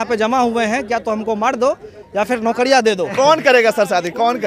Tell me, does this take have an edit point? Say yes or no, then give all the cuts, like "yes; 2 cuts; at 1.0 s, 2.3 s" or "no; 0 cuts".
yes; 1 cut; at 3.1 s